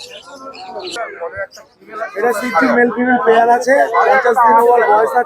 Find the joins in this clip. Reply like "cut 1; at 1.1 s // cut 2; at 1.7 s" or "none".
cut 1; at 1.0 s